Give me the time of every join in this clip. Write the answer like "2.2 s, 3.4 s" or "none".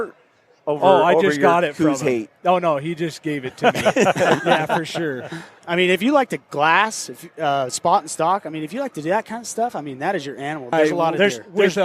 5.5 s, 10.7 s